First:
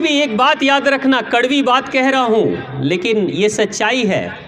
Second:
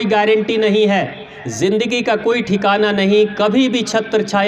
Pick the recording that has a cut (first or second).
second